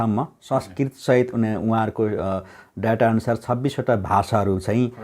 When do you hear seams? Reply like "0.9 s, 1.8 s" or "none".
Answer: none